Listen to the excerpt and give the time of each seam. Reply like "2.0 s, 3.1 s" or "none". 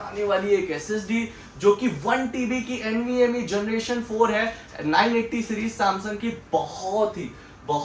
none